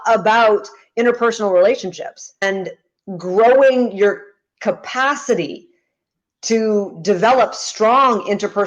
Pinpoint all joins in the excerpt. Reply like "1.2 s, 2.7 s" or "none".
2.4 s

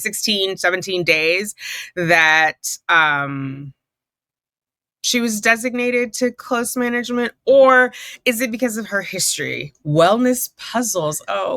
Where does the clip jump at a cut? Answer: 9.8 s

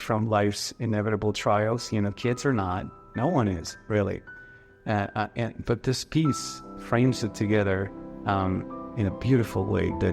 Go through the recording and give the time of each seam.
none

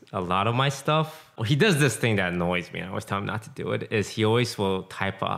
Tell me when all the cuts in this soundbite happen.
1.4 s

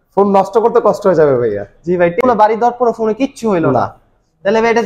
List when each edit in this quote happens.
2.1 s

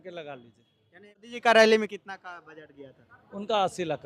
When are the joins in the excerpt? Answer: 1.3 s

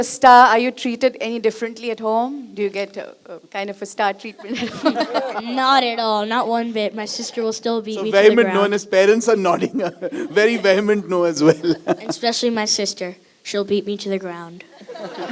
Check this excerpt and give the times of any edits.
none

